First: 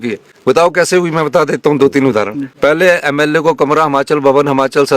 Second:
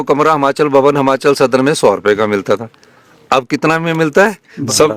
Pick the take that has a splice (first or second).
first